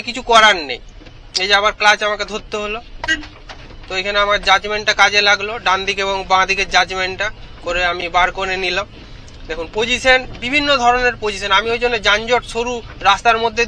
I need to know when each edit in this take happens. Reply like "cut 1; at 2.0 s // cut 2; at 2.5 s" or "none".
none